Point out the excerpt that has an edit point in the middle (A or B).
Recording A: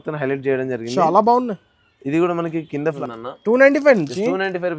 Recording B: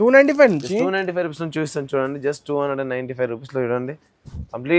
A